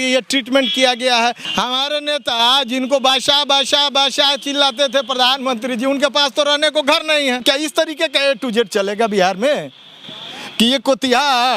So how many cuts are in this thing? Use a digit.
2